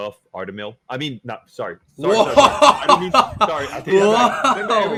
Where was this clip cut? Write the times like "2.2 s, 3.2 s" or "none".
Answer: none